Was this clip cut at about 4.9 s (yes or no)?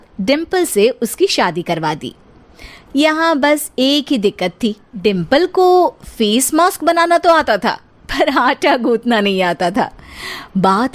yes